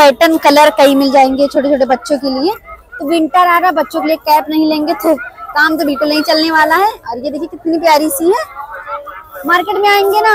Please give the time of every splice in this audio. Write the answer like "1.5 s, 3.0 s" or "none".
none